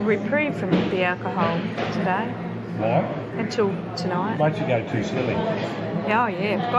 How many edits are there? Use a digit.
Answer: 0